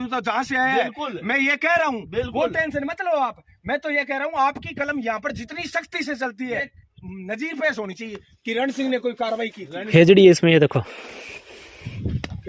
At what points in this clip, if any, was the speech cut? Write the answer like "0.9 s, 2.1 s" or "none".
6.8 s, 9.7 s